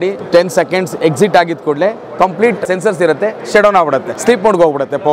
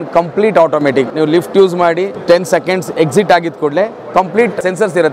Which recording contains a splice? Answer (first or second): first